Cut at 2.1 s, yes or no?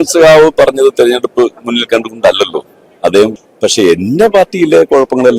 no